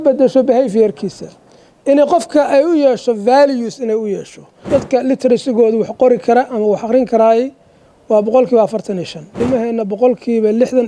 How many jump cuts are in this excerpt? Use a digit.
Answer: 2